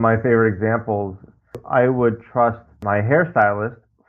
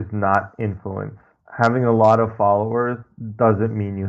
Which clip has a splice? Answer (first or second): first